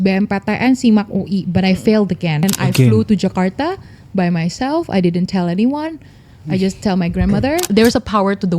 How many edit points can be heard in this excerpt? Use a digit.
2